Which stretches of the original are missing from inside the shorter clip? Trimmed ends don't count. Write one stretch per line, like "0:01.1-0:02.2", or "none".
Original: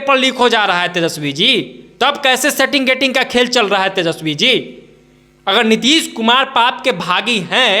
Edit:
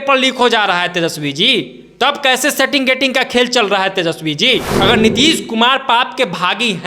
0:04.7-0:05.4